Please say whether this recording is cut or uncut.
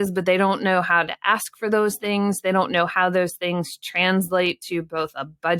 uncut